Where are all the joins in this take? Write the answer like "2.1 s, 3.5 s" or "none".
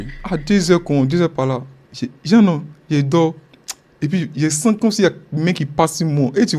none